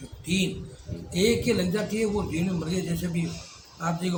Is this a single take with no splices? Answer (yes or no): yes